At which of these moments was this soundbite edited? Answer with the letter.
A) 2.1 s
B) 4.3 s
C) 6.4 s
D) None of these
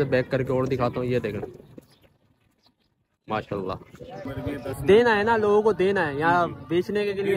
B